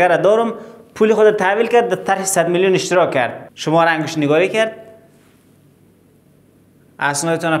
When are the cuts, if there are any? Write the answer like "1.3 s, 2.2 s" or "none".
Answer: 3.5 s